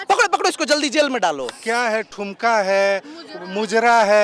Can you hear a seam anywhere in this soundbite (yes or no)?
yes